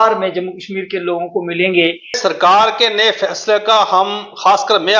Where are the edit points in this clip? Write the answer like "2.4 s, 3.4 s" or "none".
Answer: 2.2 s